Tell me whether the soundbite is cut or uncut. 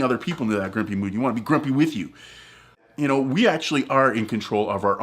cut